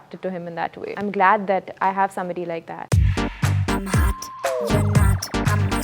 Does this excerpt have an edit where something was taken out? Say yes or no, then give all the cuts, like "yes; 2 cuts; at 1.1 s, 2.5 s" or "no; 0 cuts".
yes; 2 cuts; at 0.9 s, 2.8 s